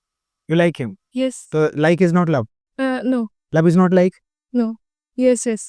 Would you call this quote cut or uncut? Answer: uncut